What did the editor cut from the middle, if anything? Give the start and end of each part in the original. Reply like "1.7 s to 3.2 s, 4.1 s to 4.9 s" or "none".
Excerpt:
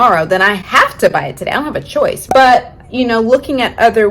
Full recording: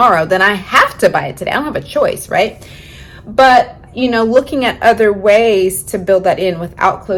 2.2 s to 3.2 s